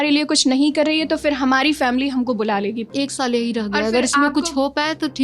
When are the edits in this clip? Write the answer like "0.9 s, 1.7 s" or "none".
2.9 s